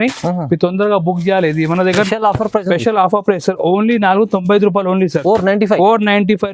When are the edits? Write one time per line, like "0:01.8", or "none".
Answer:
0:02.1

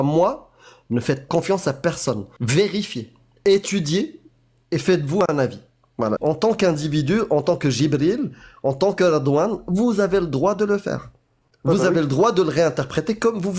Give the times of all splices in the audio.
0:01.3
0:02.3
0:06.2

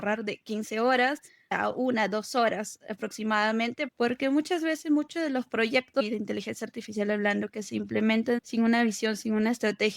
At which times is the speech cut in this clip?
0:01.6
0:03.9
0:06.0
0:08.5

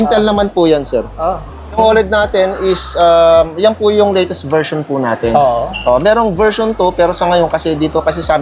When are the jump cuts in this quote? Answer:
0:01.8

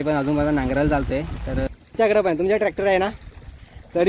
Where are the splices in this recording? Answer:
0:01.7

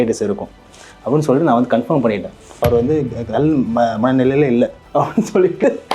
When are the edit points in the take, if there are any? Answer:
0:02.6
0:04.8

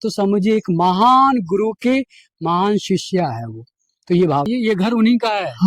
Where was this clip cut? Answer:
0:04.5

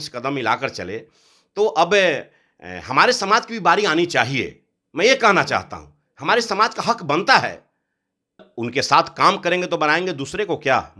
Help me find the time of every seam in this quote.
0:08.4

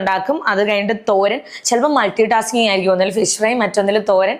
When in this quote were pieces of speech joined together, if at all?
none

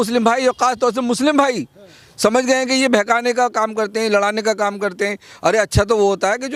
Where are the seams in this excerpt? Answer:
none

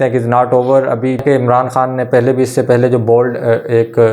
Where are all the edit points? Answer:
0:01.2

